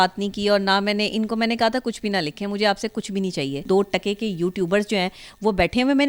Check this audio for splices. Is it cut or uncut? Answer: cut